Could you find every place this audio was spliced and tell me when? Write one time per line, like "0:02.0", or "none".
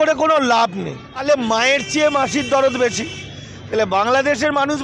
0:01.2